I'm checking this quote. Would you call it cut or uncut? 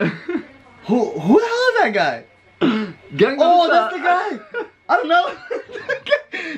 uncut